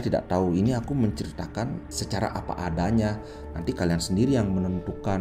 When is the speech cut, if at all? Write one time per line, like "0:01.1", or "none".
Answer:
0:01.9